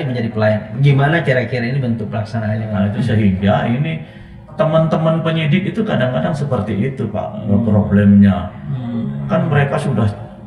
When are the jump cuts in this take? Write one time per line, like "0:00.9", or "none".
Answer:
0:02.7